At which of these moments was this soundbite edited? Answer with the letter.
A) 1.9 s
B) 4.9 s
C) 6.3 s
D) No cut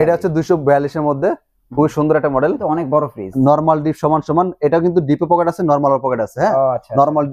D